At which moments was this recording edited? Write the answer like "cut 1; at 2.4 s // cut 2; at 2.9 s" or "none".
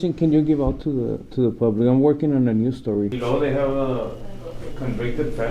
cut 1; at 3.2 s